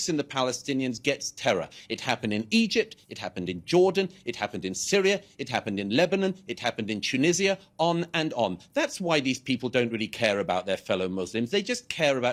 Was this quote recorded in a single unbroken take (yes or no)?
yes